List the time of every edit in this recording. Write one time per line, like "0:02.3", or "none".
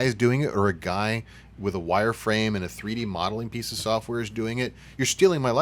none